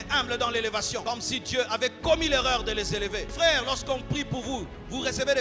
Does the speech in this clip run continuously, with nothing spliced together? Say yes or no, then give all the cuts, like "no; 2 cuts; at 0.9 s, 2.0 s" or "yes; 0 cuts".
no; 2 cuts; at 1.0 s, 3.3 s